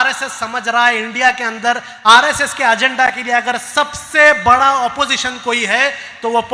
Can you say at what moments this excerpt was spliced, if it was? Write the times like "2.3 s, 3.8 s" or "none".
none